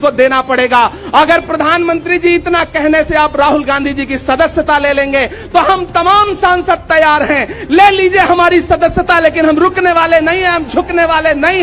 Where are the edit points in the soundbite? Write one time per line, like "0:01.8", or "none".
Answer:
none

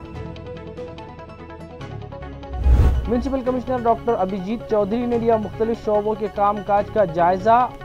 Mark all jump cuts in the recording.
0:02.9

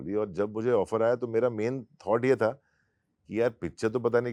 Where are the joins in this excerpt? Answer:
none

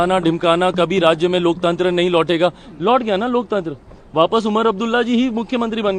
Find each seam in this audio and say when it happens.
none

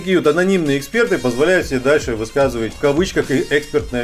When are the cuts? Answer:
0:02.7

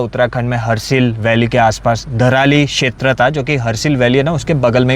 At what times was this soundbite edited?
none

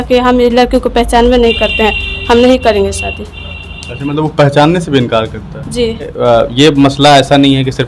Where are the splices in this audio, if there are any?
0:06.1

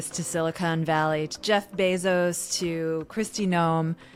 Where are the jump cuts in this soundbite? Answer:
none

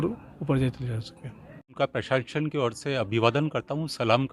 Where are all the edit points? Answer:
0:01.7

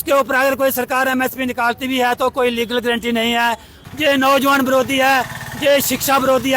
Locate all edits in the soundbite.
0:03.8

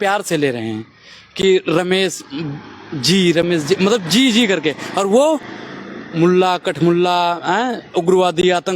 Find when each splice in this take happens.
none

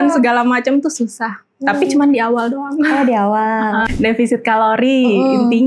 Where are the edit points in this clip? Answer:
0:03.9

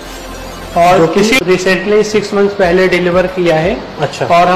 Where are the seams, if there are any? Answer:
0:01.4

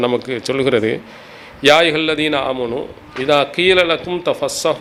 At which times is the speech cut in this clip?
none

